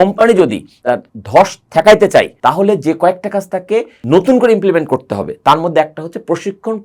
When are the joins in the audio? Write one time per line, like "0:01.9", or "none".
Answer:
none